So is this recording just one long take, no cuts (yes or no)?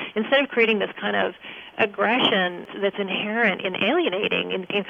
no